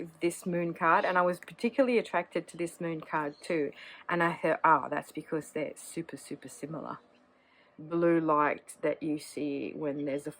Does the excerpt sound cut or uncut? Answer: cut